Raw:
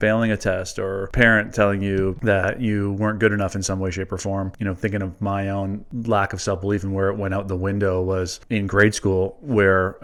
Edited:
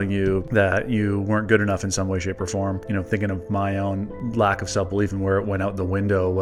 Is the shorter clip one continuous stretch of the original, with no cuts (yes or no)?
yes